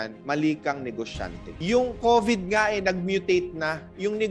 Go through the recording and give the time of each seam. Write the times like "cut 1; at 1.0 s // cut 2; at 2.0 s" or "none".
cut 1; at 1.6 s